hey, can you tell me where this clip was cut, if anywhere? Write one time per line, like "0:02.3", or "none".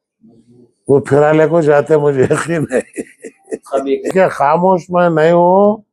0:04.1